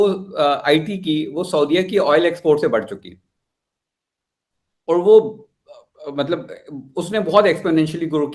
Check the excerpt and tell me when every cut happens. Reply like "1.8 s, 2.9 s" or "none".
none